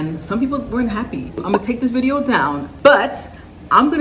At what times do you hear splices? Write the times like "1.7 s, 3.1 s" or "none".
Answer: 1.4 s, 2.7 s